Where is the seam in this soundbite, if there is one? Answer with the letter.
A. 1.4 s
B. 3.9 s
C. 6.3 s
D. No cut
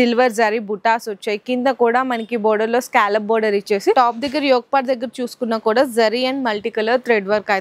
B